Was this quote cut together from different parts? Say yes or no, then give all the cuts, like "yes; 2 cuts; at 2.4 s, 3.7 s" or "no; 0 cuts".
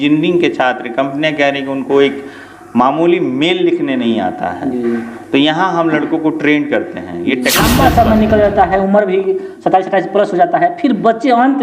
yes; 1 cut; at 7.6 s